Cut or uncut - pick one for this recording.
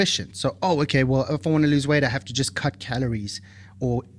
uncut